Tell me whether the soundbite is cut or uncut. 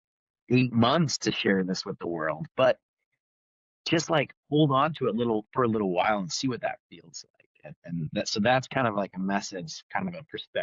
uncut